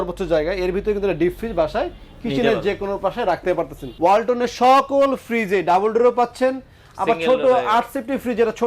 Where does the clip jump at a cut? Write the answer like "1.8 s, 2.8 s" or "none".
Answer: 3.8 s